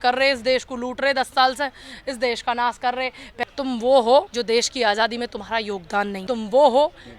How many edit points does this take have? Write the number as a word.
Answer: three